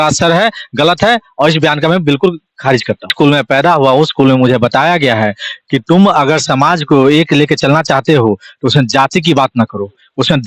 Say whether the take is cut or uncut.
cut